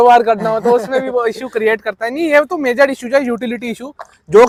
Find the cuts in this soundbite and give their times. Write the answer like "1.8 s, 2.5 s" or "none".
none